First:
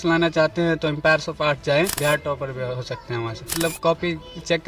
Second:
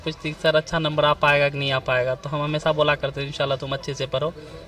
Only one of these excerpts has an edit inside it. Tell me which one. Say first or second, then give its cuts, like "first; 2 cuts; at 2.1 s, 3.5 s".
first; 2 cuts; at 1.9 s, 3.6 s